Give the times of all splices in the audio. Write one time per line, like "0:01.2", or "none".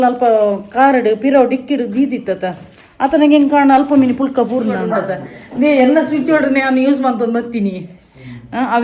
0:04.9